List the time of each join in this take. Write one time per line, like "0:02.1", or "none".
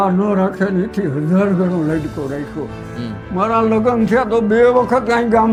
none